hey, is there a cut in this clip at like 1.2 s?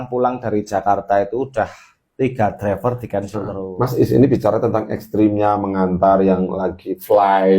no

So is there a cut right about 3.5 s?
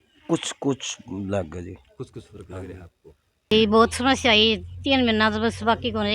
yes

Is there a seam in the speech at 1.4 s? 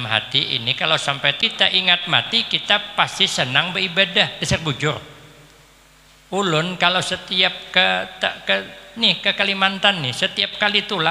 yes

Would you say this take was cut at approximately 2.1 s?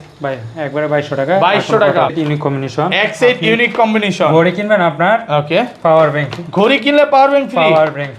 yes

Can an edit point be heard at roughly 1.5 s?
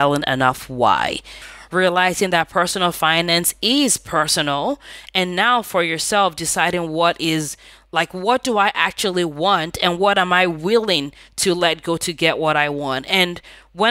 yes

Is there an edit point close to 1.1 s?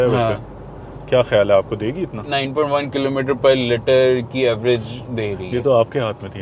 no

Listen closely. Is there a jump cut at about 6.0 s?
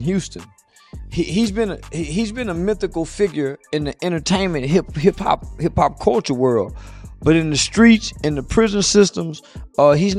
no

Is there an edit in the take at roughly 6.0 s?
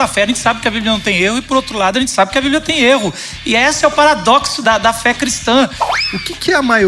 yes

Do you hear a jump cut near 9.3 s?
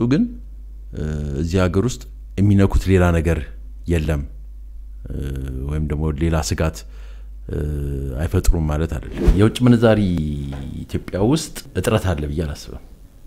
yes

